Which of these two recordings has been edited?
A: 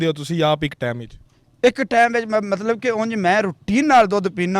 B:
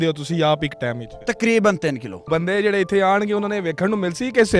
B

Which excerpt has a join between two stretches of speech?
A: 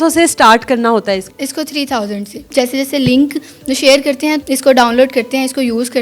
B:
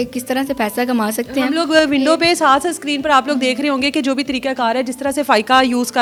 A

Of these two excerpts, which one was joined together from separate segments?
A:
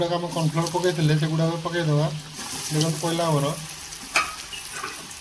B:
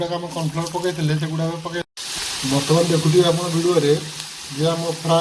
B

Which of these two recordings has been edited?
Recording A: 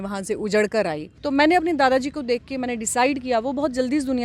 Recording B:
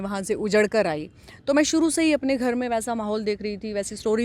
A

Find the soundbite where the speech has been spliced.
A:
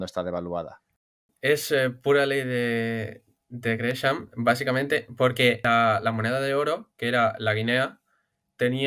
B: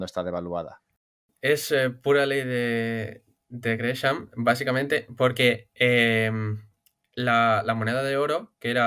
A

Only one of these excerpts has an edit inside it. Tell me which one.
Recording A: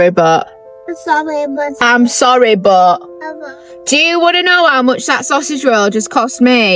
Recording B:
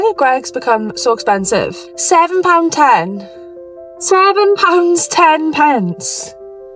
B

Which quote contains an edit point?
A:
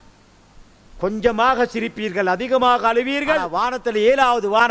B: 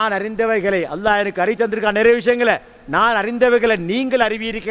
A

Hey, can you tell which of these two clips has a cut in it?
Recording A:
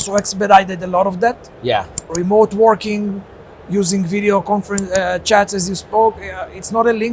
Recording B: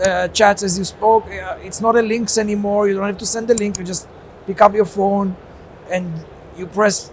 A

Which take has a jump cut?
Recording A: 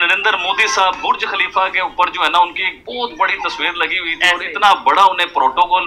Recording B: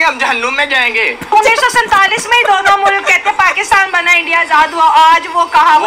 B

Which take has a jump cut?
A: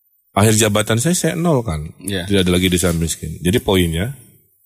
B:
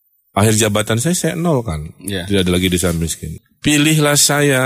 B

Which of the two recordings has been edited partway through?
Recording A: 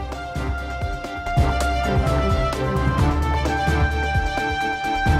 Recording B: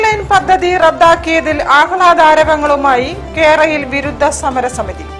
A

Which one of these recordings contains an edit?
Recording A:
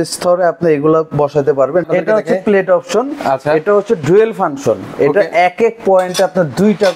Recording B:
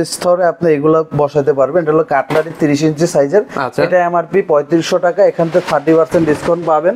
A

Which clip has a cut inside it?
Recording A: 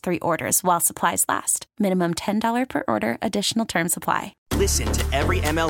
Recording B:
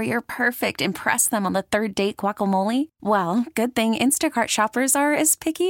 A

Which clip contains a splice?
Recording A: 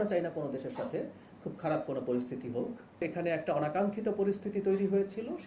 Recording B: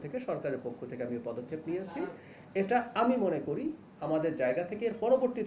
A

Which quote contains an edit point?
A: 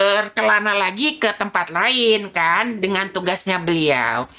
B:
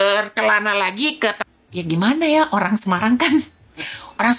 B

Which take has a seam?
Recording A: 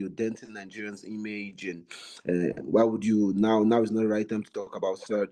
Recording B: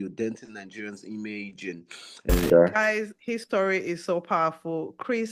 B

